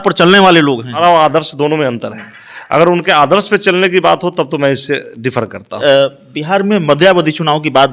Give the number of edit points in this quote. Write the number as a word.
two